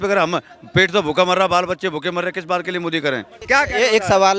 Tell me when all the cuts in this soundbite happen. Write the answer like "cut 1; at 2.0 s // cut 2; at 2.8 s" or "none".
none

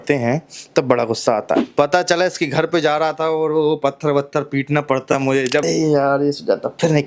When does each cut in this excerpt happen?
cut 1; at 1.7 s // cut 2; at 5.6 s

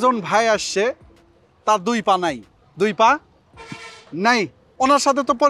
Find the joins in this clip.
none

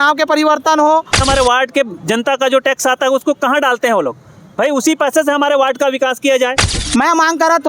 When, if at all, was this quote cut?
cut 1; at 1.2 s // cut 2; at 6.8 s

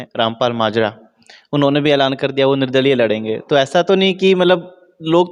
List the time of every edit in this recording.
none

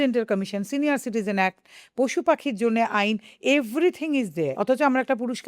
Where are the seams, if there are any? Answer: cut 1; at 4.5 s

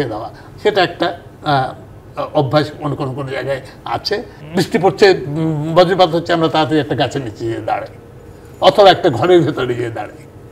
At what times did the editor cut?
cut 1; at 4.4 s

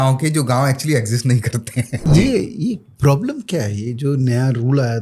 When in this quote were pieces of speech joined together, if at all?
cut 1; at 2.0 s

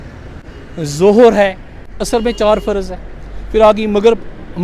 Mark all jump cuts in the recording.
cut 1; at 1.9 s

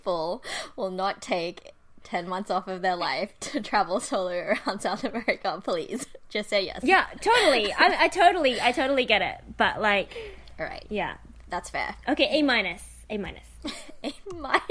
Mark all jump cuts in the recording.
cut 1; at 13.5 s

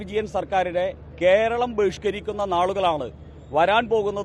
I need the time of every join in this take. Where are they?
none

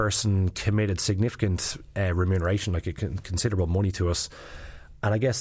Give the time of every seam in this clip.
none

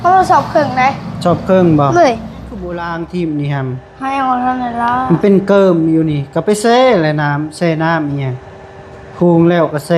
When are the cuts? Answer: cut 1; at 2.7 s

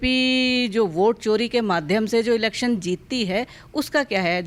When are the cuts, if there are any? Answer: none

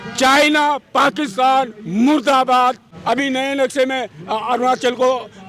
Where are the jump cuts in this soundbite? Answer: cut 1; at 2.9 s

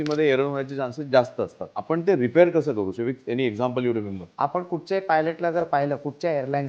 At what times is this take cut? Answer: cut 1; at 1.7 s // cut 2; at 2.9 s // cut 3; at 4.2 s

